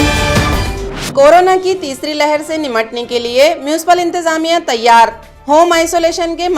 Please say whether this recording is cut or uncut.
uncut